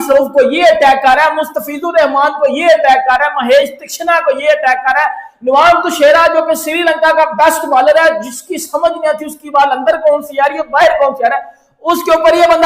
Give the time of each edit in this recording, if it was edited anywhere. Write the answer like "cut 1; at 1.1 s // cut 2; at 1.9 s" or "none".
none